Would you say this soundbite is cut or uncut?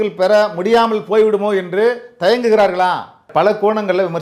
cut